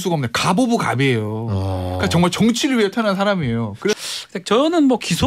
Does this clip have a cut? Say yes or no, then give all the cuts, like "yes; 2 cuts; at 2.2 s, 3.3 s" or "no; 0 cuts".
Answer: yes; 1 cut; at 3.9 s